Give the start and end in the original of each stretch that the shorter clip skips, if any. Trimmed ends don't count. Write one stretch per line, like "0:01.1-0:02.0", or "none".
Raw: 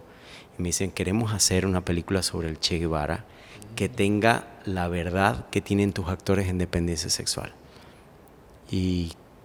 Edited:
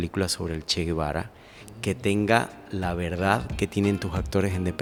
none